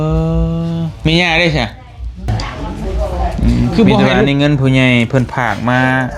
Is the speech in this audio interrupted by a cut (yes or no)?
yes